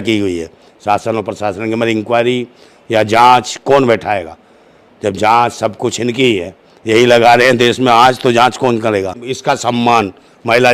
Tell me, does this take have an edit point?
yes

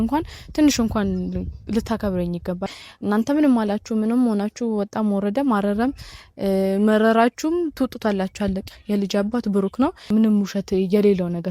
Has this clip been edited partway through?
yes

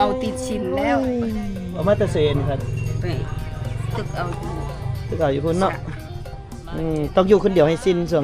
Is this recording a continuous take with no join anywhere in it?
no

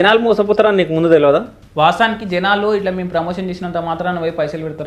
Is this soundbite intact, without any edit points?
yes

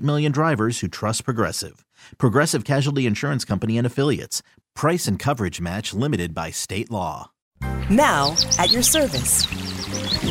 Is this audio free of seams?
no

